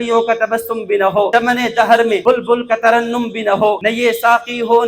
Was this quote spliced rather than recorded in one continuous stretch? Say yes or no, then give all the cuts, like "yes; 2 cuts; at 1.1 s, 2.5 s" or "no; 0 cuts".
yes; 3 cuts; at 1.3 s, 2.2 s, 3.8 s